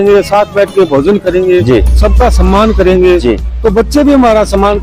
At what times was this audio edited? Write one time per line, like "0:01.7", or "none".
none